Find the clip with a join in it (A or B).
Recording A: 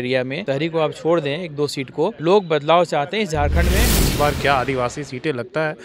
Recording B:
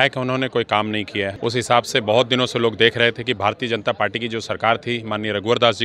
A